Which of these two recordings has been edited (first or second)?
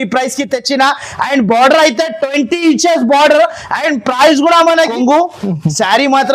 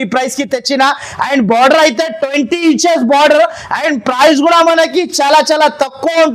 first